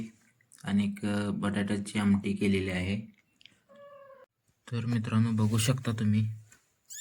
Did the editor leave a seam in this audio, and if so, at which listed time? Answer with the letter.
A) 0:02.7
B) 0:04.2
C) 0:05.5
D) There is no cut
B